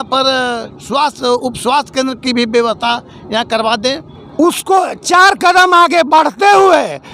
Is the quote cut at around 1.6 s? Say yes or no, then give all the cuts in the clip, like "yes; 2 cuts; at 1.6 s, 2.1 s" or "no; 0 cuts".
no; 1 cut; at 4.2 s